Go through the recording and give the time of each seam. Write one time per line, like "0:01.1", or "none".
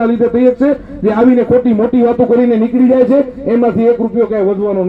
none